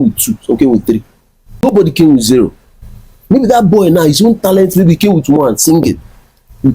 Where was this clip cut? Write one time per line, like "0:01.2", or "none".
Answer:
0:01.6